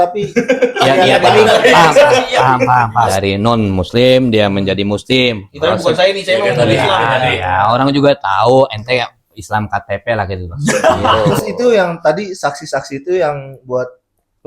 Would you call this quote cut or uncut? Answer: cut